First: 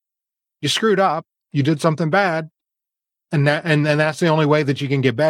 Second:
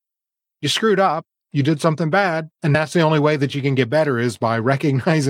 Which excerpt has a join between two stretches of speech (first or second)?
second